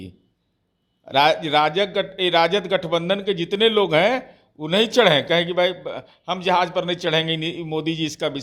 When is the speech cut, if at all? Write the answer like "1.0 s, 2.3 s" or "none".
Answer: none

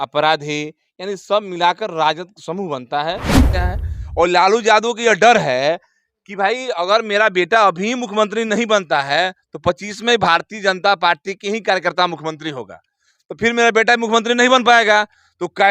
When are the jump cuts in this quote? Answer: 3.5 s

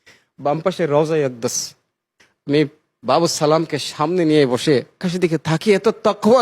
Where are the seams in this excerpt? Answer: 5.1 s

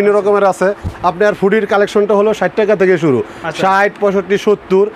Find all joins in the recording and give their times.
none

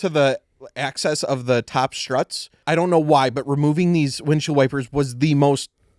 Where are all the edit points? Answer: 2.5 s

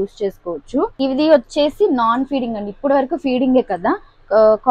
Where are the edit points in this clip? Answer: 1.0 s

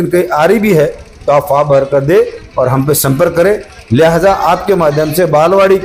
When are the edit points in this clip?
none

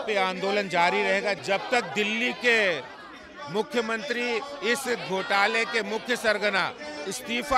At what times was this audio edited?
none

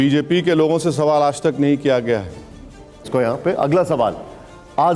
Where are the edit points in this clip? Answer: 3.1 s

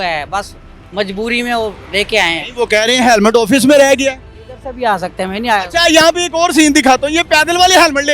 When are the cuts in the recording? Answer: none

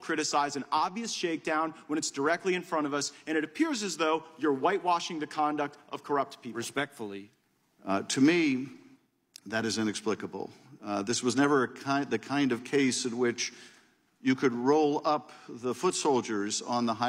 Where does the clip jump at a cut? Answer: 6.8 s, 7.3 s

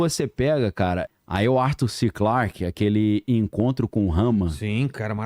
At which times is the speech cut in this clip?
1.1 s

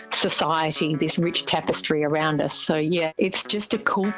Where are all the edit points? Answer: 3.1 s

